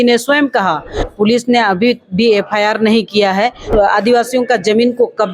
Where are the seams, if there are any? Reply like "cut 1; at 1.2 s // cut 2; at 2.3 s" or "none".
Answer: cut 1; at 1.1 s // cut 2; at 3.7 s